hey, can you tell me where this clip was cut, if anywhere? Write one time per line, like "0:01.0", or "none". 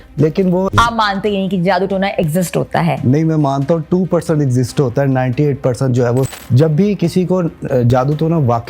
0:00.7
0:06.3